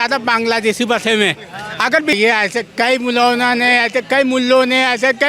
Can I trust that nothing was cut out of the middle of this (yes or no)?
no